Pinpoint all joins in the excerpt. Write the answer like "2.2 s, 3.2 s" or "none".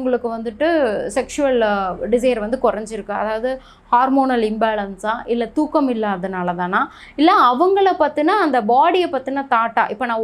none

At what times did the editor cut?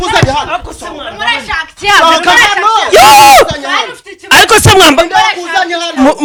none

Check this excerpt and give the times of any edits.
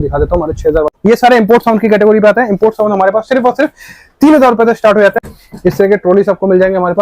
0.9 s, 5.4 s

